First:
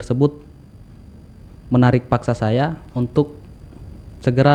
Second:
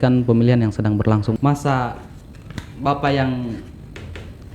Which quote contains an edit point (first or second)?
second